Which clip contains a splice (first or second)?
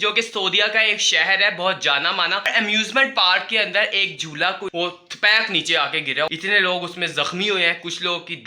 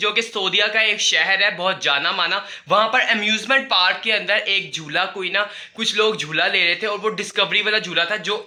first